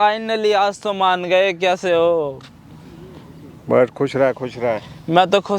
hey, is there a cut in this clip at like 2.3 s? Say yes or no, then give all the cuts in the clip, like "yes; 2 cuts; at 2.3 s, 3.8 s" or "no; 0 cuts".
no; 0 cuts